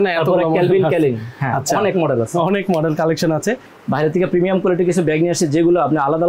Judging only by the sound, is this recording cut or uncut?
cut